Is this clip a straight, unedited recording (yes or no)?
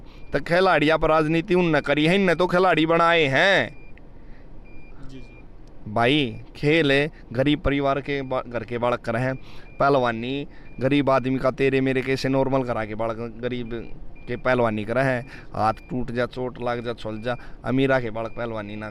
yes